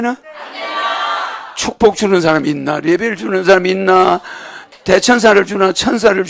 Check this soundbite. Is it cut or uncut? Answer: uncut